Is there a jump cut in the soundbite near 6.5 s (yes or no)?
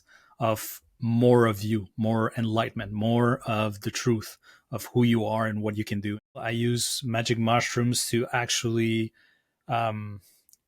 yes